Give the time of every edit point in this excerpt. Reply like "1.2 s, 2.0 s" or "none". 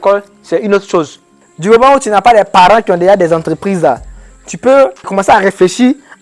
1.2 s, 5.0 s